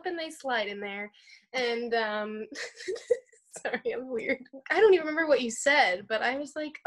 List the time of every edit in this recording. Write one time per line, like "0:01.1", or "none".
0:04.5